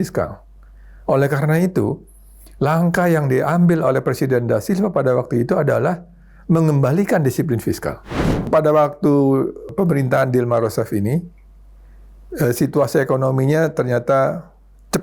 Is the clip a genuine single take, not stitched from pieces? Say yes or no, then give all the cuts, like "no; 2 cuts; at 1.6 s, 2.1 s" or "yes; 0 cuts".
no; 2 cuts; at 8.5 s, 9.7 s